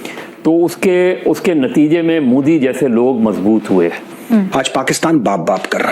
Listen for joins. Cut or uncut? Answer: cut